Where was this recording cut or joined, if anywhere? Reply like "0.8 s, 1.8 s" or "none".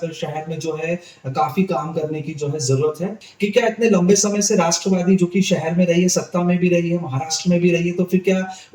3.3 s

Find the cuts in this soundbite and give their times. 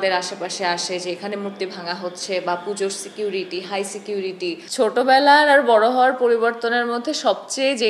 4.7 s

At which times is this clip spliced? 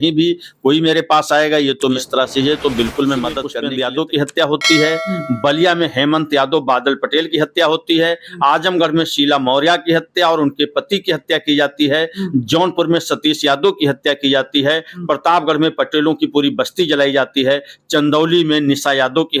2.0 s, 3.5 s

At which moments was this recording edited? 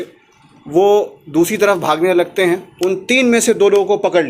2.7 s

